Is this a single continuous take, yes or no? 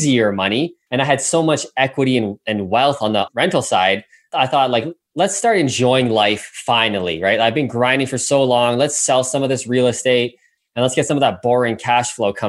no